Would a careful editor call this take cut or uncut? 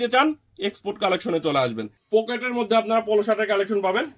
cut